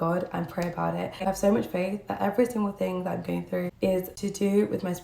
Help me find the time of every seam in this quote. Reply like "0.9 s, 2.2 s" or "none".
1.2 s, 3.7 s